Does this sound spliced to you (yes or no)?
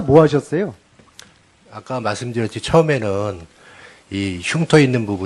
no